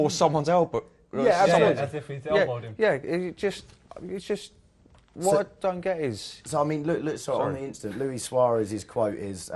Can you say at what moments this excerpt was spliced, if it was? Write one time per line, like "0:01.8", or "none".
none